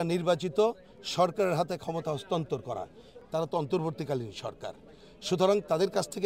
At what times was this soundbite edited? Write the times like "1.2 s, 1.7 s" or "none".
3.1 s